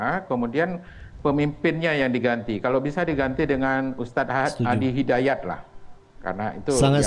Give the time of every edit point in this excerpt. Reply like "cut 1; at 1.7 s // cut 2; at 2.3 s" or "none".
none